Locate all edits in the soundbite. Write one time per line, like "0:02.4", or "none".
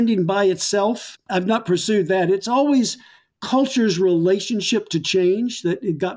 none